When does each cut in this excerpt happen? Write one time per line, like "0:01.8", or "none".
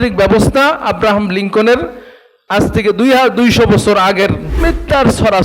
0:04.5